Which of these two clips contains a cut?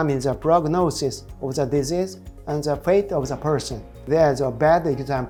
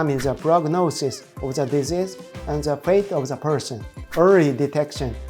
second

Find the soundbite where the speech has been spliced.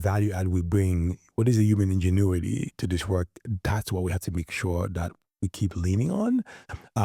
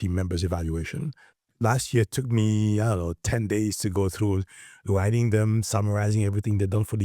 second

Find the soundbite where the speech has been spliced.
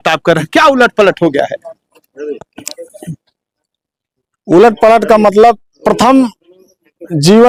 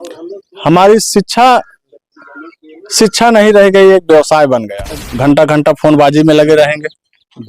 second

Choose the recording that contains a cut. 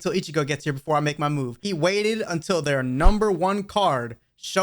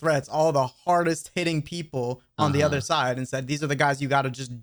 first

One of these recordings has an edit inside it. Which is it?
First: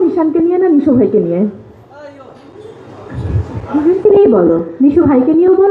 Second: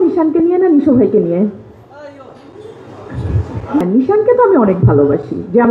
second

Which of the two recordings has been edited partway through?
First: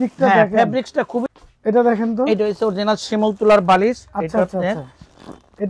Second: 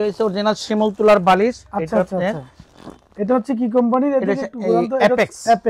first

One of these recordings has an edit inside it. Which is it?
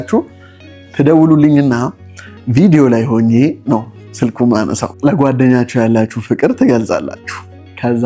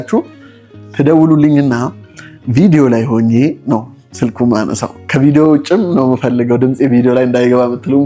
first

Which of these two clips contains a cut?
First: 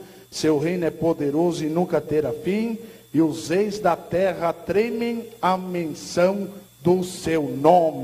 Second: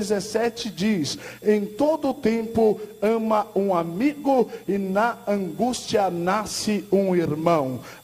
second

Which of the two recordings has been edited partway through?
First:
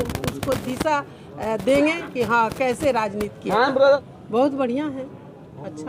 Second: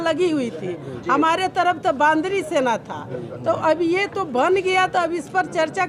first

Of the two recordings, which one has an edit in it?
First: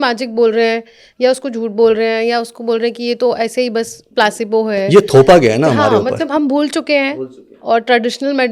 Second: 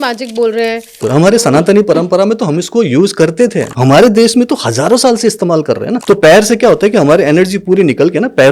second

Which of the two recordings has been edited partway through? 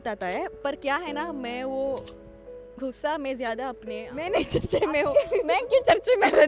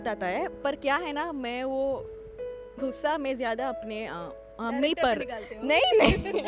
first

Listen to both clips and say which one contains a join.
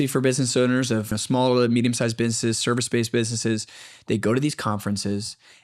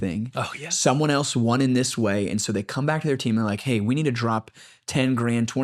first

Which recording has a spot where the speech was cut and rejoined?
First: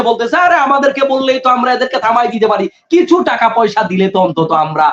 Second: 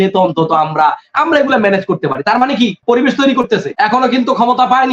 second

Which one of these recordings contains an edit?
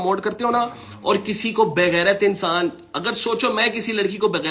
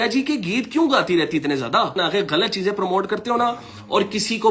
second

